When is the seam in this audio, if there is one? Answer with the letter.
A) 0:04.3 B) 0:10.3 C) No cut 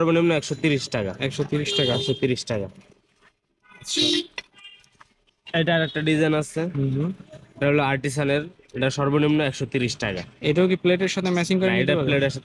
C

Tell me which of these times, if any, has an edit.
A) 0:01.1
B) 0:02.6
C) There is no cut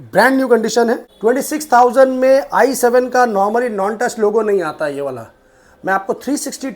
A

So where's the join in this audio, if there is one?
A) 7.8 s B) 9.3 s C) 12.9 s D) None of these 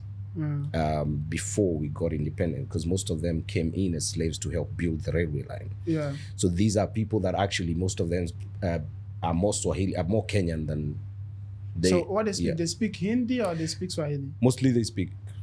D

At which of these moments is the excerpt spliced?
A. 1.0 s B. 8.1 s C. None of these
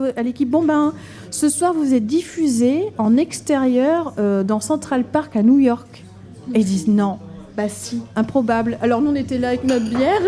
B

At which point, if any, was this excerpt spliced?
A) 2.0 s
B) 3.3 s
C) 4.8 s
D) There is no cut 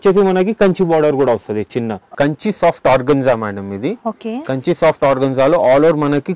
A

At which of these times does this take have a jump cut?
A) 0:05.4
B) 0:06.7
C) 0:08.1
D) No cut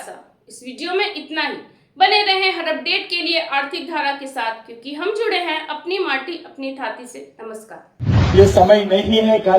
C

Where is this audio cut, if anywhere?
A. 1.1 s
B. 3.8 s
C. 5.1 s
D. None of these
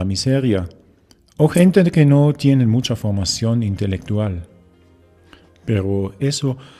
B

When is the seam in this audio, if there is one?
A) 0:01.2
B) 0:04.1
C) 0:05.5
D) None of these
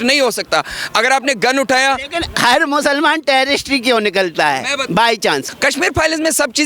C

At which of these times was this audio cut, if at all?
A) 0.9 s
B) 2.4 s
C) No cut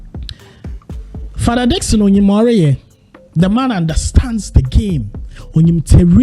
A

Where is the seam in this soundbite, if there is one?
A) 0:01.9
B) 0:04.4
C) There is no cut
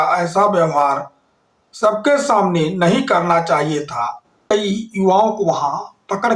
B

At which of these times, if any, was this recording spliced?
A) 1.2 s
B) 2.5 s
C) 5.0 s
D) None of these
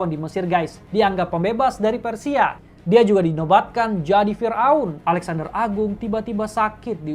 C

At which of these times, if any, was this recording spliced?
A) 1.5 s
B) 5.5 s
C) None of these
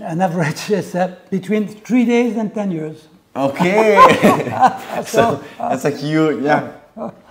C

